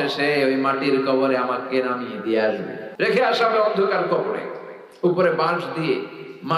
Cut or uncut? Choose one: cut